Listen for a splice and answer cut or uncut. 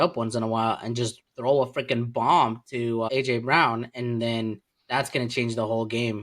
cut